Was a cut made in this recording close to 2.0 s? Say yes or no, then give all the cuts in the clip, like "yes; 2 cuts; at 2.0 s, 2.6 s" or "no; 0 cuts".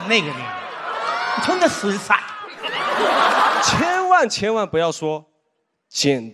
no; 1 cut; at 3.7 s